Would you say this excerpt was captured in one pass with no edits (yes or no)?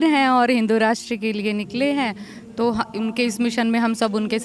yes